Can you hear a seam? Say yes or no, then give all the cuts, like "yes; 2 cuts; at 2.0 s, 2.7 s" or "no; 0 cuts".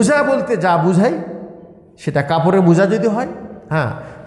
no; 0 cuts